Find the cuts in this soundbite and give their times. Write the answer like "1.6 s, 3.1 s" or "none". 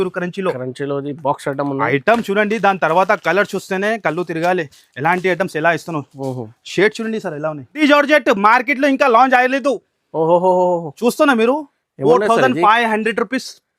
7.8 s